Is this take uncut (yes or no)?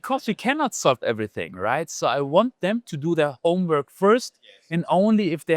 yes